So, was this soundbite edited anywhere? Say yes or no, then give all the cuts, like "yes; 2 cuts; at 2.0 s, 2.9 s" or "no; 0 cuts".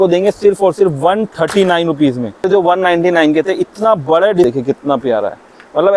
yes; 2 cuts; at 2.5 s, 4.4 s